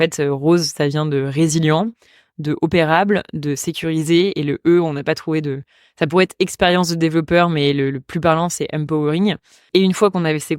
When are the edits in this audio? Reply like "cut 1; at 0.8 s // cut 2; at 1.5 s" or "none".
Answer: cut 1; at 9.6 s